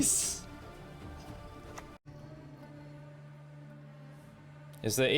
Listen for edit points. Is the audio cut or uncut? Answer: cut